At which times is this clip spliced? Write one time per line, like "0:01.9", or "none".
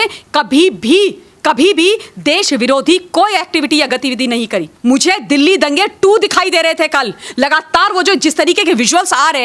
0:04.7